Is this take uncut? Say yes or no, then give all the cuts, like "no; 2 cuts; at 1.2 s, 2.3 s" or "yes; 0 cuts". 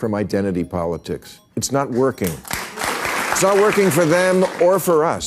no; 1 cut; at 2.9 s